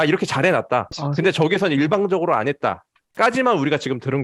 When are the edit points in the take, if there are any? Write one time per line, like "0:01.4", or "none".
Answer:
0:01.0

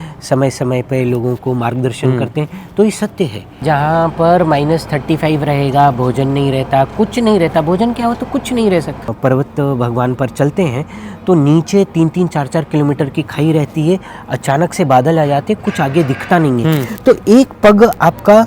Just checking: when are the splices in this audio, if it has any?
0:03.6
0:09.1

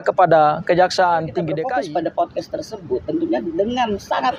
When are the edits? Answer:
0:01.6

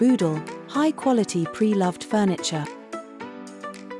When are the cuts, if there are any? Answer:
0:02.7

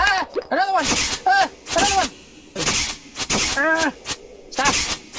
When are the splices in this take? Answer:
none

